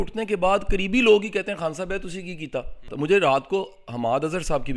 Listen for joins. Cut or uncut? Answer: cut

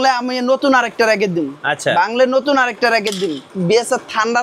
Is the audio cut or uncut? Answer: cut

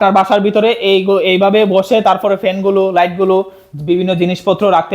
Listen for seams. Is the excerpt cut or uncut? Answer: uncut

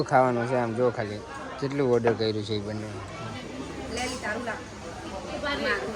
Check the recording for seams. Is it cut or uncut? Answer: uncut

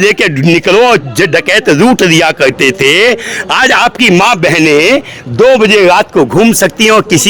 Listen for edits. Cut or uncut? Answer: uncut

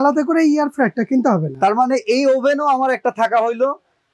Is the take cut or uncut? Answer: uncut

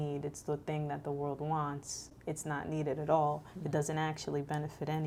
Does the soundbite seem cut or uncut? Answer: uncut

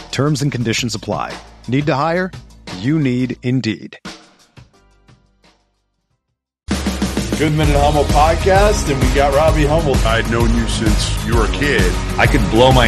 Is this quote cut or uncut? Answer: cut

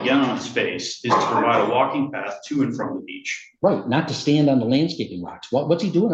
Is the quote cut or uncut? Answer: uncut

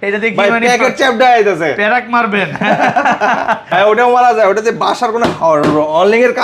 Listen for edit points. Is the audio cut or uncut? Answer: cut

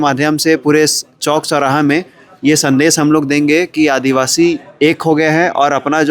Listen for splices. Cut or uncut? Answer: uncut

